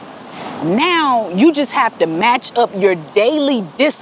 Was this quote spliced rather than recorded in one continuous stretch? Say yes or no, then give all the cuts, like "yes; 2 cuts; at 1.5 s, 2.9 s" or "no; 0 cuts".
no; 0 cuts